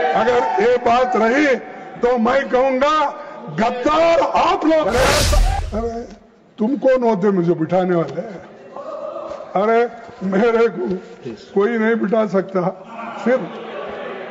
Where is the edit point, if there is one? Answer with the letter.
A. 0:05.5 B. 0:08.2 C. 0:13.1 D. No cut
A